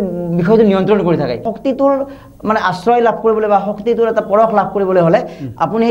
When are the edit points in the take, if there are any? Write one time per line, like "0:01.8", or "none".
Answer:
0:01.5